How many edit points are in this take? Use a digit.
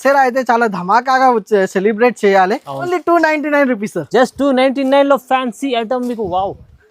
1